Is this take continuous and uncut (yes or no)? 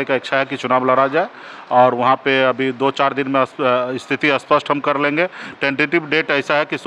yes